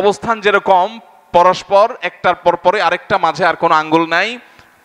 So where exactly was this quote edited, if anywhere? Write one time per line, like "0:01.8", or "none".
none